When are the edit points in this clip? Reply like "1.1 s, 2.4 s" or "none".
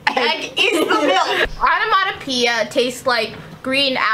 1.5 s